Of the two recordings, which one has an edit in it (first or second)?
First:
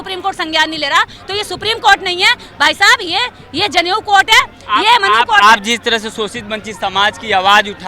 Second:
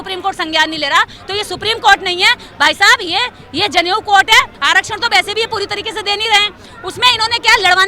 second